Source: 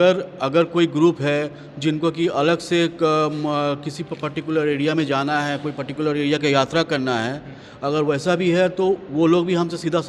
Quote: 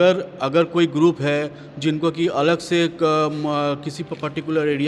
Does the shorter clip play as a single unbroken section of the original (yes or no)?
yes